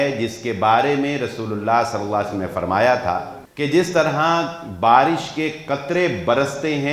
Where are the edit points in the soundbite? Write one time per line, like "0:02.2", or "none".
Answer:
0:03.4